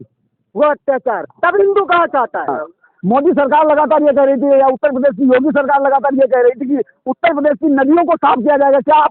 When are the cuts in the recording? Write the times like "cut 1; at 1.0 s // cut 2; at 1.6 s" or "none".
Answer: cut 1; at 2.5 s